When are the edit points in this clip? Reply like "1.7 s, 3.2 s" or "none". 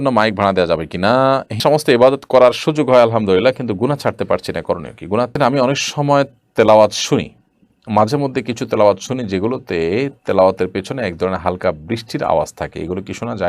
1.6 s, 5.3 s